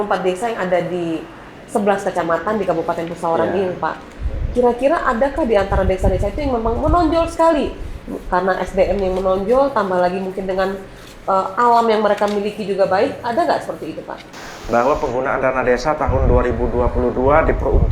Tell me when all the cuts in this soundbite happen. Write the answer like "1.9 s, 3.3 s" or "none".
14.4 s